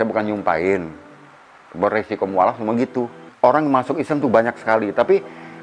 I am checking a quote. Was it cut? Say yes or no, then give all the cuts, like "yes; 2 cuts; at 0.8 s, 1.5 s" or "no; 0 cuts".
yes; 1 cut; at 3.2 s